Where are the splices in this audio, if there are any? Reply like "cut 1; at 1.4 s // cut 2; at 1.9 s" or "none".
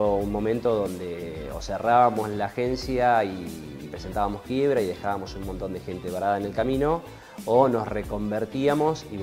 none